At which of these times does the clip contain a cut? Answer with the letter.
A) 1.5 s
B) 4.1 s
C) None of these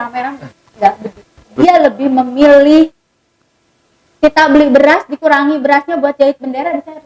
A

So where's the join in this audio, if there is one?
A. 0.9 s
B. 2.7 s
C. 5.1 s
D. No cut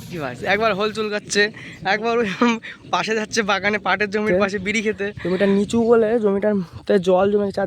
C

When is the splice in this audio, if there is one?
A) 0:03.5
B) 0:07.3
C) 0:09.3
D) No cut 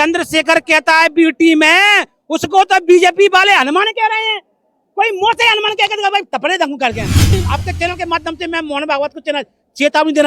B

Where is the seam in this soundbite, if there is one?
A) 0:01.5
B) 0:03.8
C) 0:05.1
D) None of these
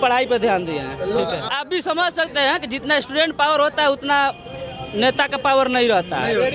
A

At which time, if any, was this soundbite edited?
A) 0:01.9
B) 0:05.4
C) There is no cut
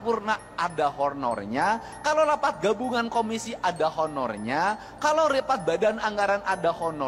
C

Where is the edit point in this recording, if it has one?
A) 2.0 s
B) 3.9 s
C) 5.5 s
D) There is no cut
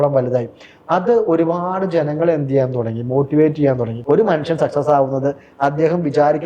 B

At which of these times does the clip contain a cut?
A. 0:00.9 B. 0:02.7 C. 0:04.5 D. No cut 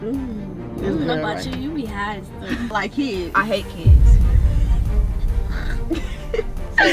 B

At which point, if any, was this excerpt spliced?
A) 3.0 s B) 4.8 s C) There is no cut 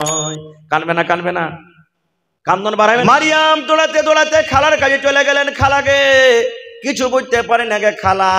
A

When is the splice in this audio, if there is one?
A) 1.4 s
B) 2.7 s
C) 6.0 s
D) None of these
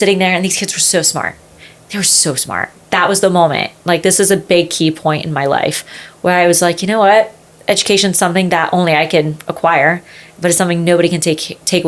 B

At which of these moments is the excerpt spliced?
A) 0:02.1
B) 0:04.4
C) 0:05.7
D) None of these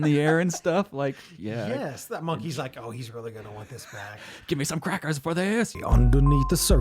C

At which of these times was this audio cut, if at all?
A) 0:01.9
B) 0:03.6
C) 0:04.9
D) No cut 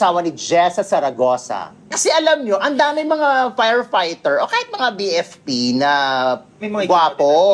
A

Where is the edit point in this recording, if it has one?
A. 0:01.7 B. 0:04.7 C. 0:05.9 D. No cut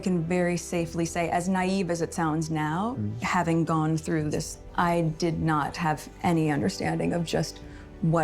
B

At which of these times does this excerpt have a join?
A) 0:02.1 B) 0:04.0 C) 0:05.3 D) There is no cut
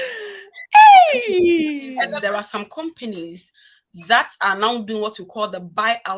A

